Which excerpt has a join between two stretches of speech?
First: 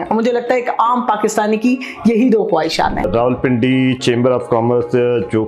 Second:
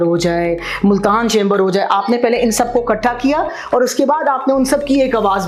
first; 1 cut; at 3.1 s

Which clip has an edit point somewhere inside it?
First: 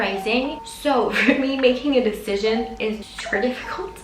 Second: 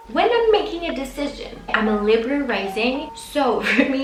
first; 1 cut; at 3.1 s

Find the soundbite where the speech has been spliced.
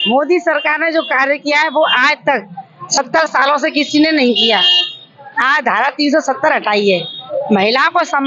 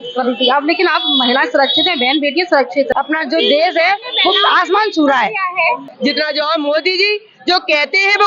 second; 2 cuts; at 2.9 s, 5.8 s

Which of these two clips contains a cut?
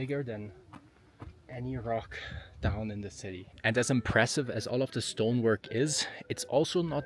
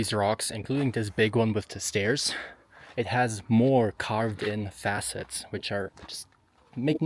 first; 1 cut; at 3.5 s

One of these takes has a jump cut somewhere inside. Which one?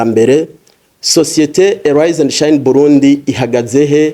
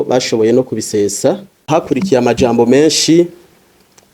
second; 1 cut; at 1.6 s

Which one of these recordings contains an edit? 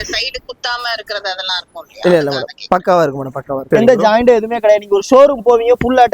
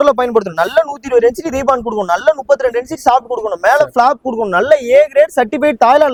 first; 1 cut; at 3.6 s

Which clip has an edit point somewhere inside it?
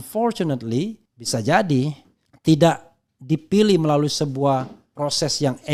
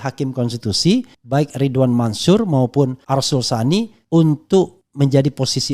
second; 4 cuts; at 1.2 s, 3.0 s, 4.0 s, 4.8 s

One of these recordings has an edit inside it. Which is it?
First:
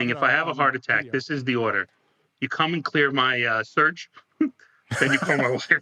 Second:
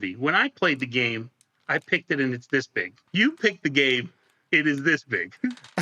second; 1 cut; at 3.0 s

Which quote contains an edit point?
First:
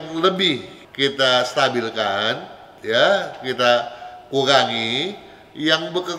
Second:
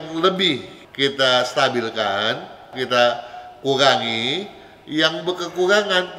second; 1 cut; at 2.7 s

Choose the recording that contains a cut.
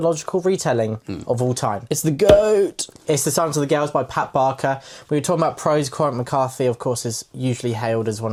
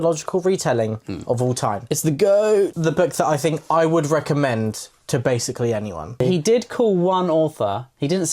second; 2 cuts; at 2.8 s, 6.2 s

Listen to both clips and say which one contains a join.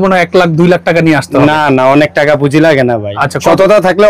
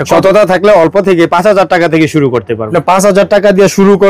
second; 1 cut; at 2.6 s

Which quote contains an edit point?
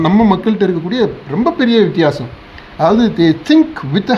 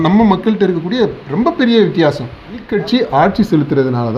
second; 1 cut; at 2.7 s

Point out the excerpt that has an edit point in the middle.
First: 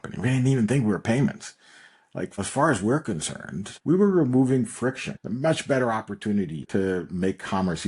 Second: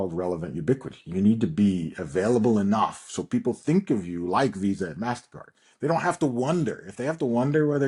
first; 4 cuts; at 2.4 s, 3.7 s, 5.1 s, 6.7 s

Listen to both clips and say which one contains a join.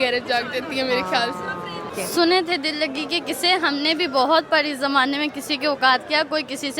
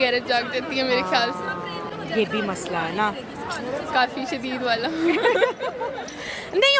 first; 1 cut; at 1.9 s

